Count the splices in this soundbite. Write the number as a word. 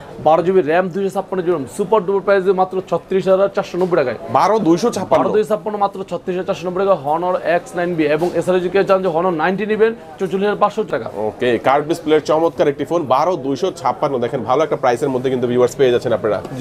zero